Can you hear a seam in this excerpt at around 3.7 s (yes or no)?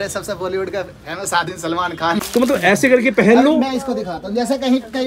no